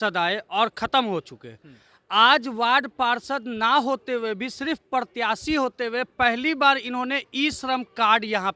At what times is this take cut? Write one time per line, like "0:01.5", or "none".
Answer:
none